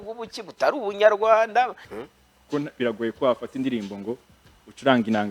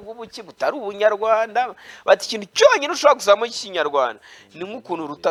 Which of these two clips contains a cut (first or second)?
first